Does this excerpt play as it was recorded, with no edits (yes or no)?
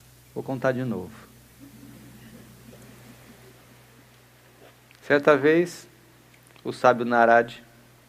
no